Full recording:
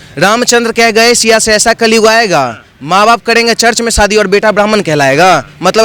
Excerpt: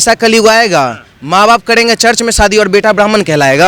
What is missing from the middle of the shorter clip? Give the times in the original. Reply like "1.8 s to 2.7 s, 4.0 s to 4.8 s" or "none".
none